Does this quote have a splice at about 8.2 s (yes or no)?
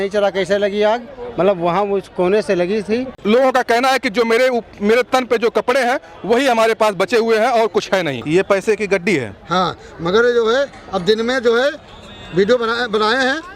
yes